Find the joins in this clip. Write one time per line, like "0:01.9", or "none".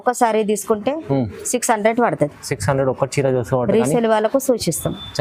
none

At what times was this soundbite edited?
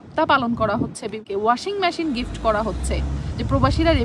0:01.2

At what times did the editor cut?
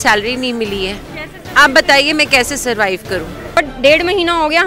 0:03.6

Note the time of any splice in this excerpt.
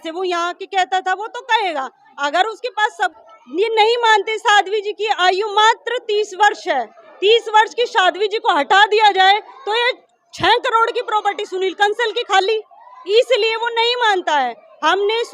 0:03.1

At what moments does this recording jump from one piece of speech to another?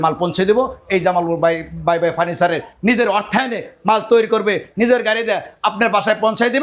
none

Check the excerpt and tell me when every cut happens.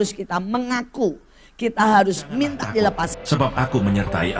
0:03.2

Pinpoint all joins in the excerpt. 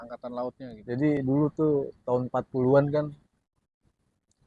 0:01.2

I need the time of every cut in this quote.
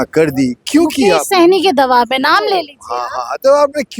none

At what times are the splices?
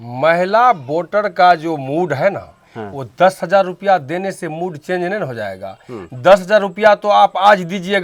none

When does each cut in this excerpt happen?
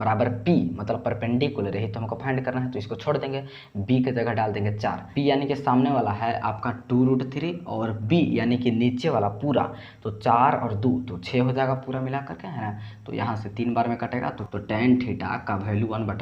0:05.0
0:14.4

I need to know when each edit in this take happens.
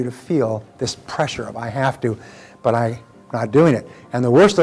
none

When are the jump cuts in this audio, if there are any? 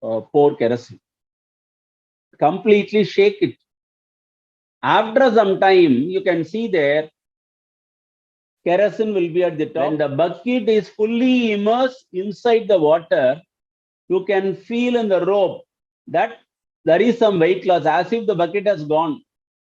0:09.9

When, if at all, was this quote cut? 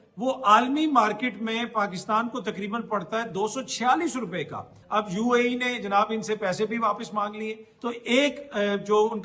0:04.8
0:07.7

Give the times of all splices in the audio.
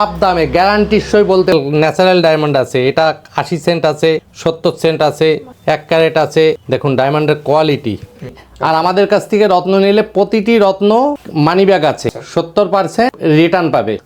0:01.5
0:04.3
0:05.5
0:06.6
0:08.4

